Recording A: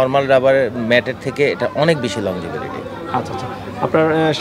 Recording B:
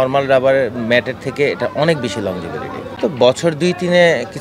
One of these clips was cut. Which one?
B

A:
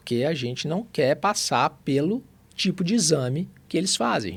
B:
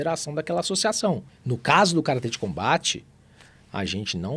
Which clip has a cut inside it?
B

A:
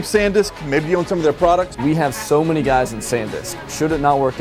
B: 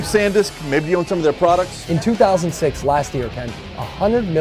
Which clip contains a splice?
A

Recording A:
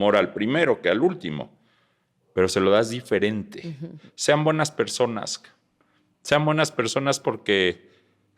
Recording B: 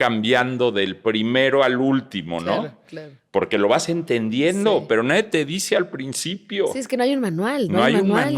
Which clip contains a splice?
A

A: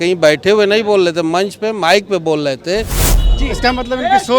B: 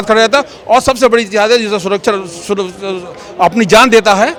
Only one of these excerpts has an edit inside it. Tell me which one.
A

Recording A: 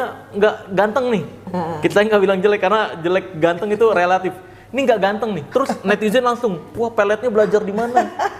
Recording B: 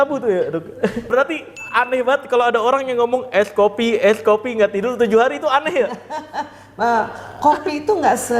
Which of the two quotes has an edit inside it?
B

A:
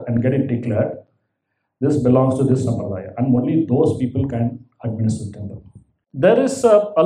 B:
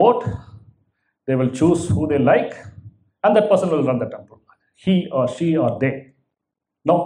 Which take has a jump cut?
A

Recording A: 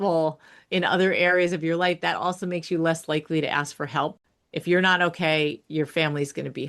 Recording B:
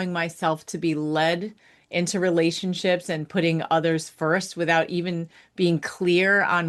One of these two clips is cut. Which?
A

